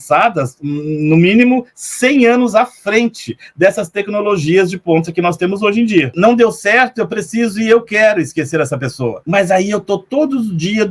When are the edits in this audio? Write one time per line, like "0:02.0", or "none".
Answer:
0:06.1